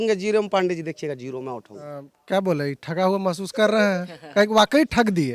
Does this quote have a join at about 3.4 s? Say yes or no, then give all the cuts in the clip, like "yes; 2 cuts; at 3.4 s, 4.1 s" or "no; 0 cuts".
no; 1 cut; at 2.1 s